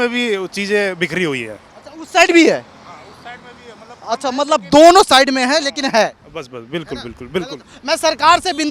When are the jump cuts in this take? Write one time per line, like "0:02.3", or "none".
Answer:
none